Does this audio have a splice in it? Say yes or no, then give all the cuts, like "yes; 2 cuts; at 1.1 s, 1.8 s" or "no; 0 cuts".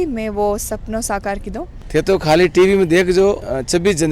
yes; 1 cut; at 1.8 s